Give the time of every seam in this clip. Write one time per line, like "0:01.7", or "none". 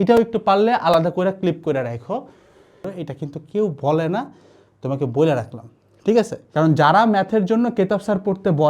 0:02.9
0:06.4